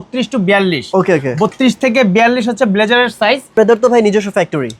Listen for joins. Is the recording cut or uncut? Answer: cut